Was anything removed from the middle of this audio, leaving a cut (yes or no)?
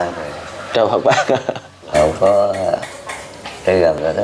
yes